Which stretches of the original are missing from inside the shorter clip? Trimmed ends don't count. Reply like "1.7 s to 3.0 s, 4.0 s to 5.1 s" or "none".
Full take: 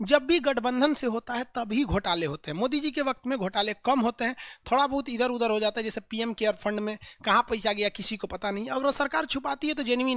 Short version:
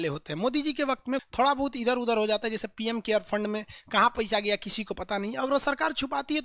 3.4 s to 4.6 s